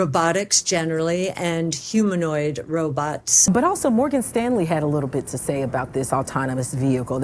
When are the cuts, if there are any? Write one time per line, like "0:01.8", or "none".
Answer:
0:03.4